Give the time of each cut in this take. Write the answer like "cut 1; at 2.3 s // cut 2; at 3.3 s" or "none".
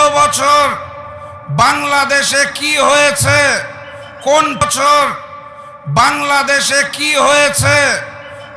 cut 1; at 4.6 s